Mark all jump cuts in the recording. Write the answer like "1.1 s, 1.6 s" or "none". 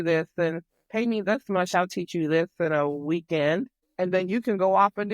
3.8 s